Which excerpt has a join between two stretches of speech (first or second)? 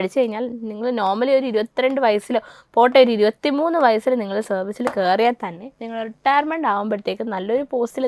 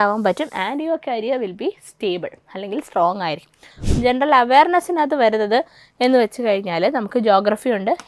second